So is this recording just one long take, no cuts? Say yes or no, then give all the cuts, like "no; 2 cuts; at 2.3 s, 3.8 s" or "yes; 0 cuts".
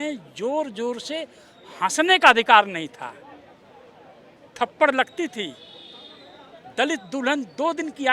yes; 0 cuts